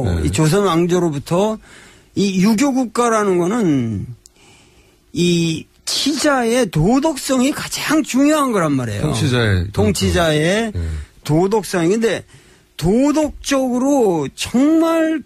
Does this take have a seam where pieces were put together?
no; 0 cuts

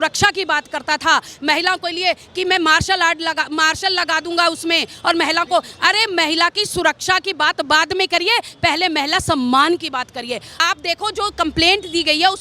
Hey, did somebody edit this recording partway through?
yes; 1 cut; at 10.5 s

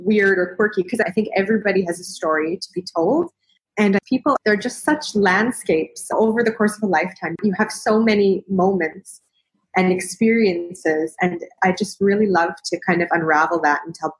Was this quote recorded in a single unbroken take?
no; 3 cuts; at 1.0 s, 4.0 s, 11.5 s

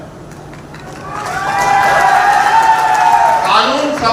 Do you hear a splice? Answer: no; 0 cuts

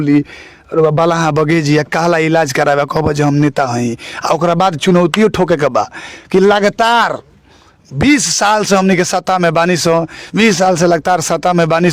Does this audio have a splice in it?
no; 0 cuts

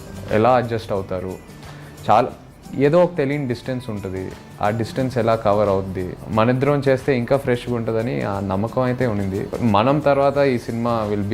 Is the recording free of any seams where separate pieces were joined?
no; 2 cuts; at 6.2 s, 9.5 s

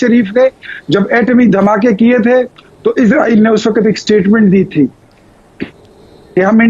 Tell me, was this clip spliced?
no; 0 cuts

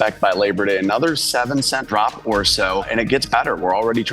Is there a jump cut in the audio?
yes; 2 cuts; at 1.8 s, 2.9 s

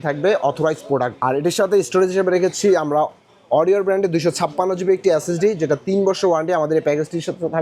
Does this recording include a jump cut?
no; 0 cuts

